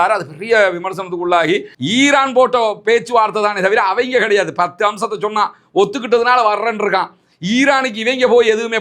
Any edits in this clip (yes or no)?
yes